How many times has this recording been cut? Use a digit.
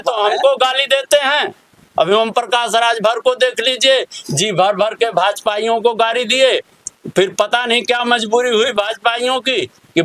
0